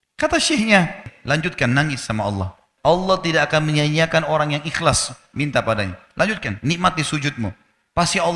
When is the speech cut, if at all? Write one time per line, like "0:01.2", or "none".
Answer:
0:01.1
0:02.7